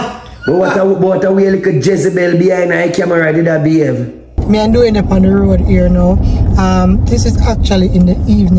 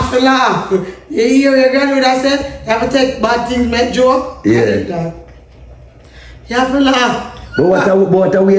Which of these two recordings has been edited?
first; 1 cut; at 4.3 s

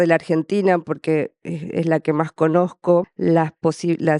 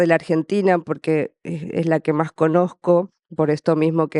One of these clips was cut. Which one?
first; 1 cut; at 3.1 s

